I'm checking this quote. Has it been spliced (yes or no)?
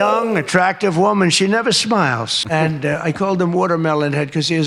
yes